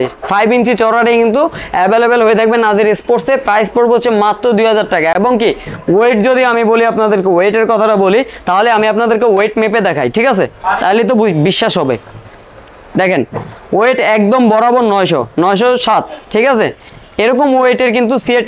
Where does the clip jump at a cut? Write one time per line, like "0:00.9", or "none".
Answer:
none